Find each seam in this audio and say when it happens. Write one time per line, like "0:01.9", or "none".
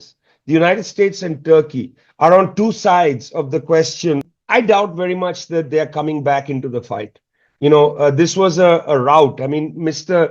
0:04.3